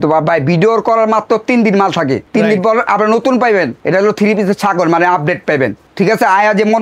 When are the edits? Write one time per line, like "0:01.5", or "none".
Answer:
0:02.2
0:03.8
0:05.8